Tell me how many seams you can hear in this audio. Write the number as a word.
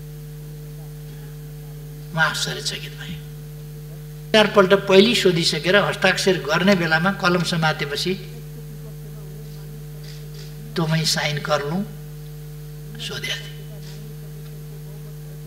one